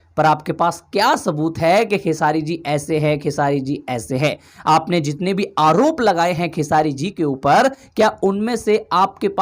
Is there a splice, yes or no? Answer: no